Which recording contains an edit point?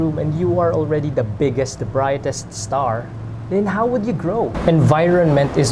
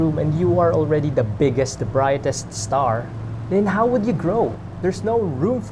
first; 1 cut; at 4.6 s

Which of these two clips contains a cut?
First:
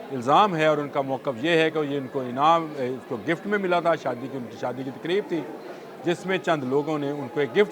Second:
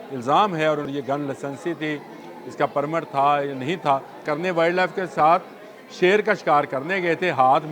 second; 2 cuts; at 0.9 s, 4.2 s

